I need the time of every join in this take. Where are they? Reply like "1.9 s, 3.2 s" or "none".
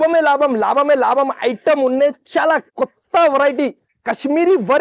none